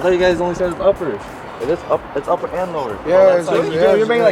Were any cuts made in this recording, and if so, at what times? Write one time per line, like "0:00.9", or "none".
0:01.4